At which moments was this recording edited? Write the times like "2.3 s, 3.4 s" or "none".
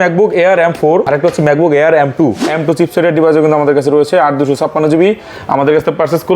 1.1 s, 2.4 s